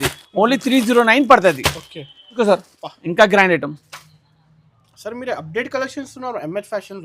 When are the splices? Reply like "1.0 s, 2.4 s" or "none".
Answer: 2.4 s

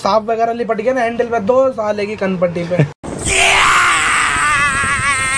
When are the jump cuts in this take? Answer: none

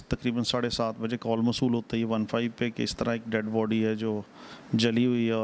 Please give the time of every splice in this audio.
none

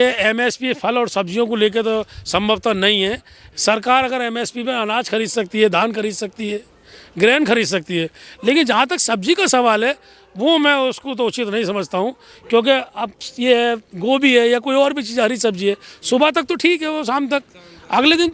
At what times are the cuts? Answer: none

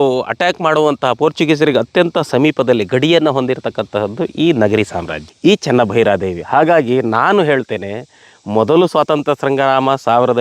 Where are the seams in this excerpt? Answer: 5.2 s

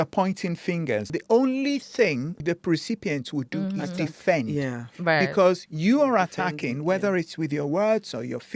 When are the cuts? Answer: 1.1 s, 2.3 s

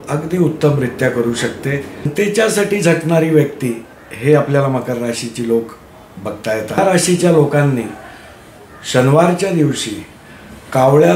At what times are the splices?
2.1 s, 6.8 s

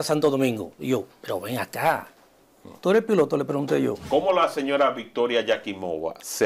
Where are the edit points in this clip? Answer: 4.0 s

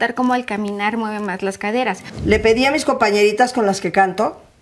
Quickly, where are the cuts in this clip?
2.1 s

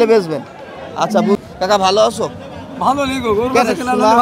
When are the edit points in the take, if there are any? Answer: 1.4 s

